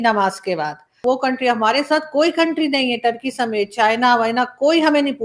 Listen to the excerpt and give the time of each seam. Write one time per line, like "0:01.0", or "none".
0:01.0